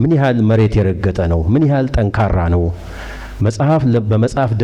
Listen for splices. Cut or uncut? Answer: uncut